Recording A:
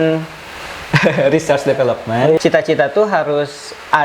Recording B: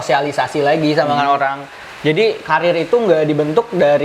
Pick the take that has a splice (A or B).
A